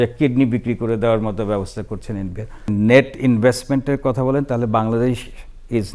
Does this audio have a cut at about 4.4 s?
no; 1 cut; at 2.7 s

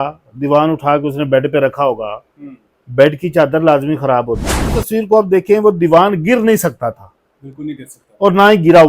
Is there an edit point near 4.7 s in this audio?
yes; 1 cut; at 4.7 s

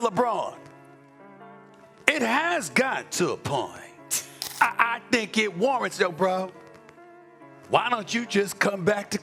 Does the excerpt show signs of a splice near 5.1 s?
no; 0 cuts

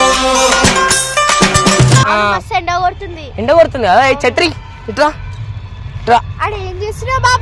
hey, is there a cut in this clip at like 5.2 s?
no; 1 cut; at 2.1 s

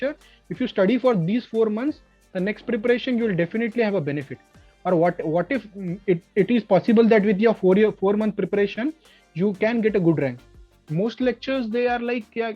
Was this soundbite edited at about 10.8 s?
yes; 1 cut; at 10.8 s

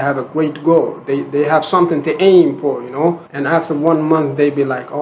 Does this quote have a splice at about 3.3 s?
yes; 1 cut; at 3.3 s

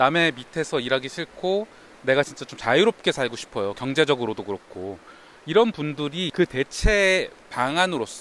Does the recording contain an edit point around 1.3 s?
no; 0 cuts

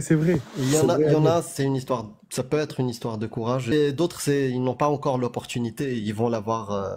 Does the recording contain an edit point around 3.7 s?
yes; 1 cut; at 3.7 s

